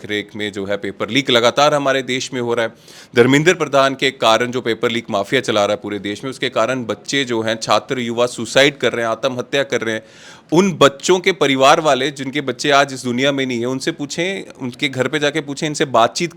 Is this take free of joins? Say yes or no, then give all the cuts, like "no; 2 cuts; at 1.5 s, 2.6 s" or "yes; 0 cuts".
yes; 0 cuts